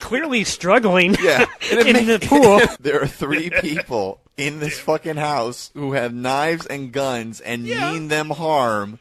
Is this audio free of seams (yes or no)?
no